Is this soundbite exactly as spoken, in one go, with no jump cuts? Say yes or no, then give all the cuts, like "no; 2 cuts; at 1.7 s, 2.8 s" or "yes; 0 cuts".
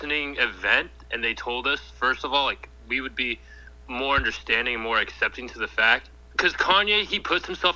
no; 1 cut; at 6.2 s